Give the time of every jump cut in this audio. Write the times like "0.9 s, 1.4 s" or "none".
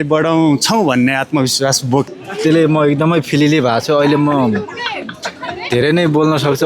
2.1 s